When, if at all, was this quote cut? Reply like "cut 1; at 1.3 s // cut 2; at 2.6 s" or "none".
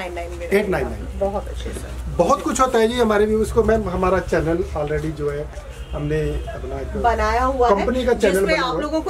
none